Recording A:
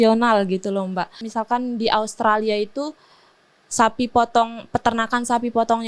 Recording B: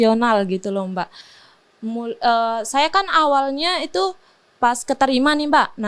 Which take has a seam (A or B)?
A